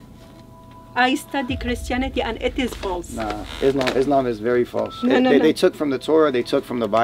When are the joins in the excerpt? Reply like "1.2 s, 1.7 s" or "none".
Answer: none